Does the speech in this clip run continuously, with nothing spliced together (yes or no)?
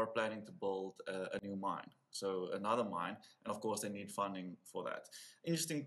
yes